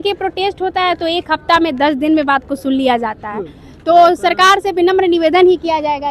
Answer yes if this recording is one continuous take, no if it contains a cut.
yes